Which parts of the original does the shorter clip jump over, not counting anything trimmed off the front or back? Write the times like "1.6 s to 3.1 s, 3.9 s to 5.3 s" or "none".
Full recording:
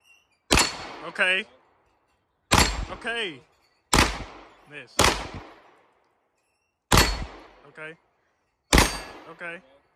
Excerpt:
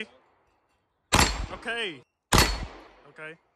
3.5 s to 6.7 s